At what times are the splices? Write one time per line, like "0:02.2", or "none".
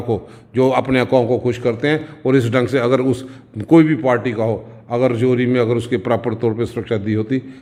none